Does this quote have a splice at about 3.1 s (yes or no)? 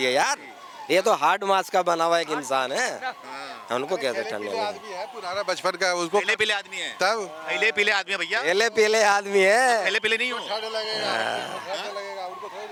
no